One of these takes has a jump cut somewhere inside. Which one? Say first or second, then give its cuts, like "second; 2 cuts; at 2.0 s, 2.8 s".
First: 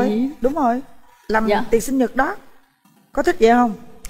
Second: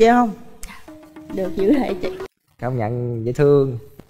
second; 1 cut; at 2.2 s